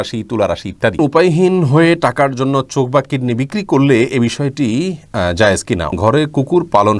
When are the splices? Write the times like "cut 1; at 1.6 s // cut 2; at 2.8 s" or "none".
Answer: cut 1; at 1.0 s // cut 2; at 5.9 s